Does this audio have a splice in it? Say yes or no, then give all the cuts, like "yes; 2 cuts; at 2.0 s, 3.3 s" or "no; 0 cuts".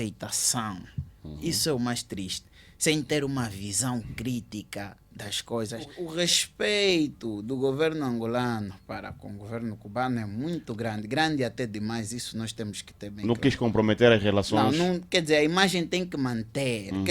yes; 1 cut; at 6.0 s